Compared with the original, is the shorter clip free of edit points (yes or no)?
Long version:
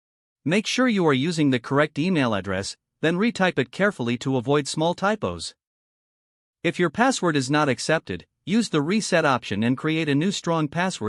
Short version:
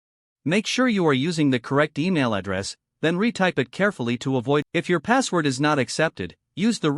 no